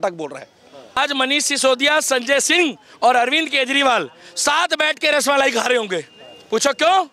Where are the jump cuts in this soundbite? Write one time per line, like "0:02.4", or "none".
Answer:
0:01.0